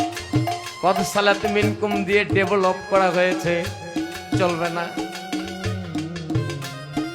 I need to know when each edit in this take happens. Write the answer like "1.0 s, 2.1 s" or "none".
none